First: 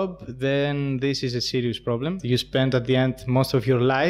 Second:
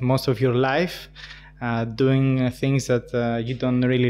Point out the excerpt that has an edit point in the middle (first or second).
first